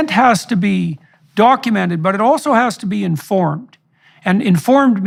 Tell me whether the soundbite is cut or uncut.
uncut